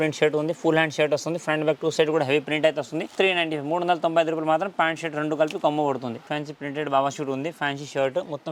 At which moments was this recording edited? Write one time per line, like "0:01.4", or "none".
0:03.1
0:06.2